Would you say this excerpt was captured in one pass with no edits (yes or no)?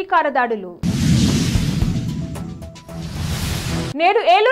yes